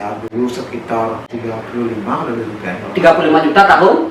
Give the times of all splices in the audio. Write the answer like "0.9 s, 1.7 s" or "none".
1.3 s